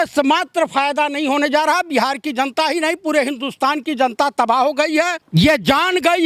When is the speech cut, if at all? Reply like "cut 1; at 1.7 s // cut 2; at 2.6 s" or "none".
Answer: cut 1; at 5.2 s